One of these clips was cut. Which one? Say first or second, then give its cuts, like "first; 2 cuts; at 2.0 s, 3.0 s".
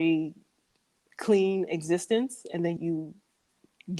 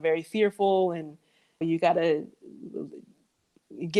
first; 1 cut; at 2.8 s